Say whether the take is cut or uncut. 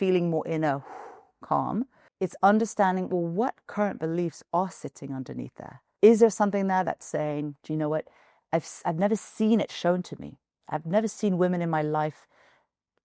cut